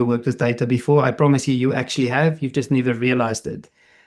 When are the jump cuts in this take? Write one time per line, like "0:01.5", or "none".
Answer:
none